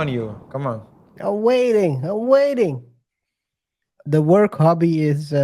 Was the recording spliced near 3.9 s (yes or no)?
yes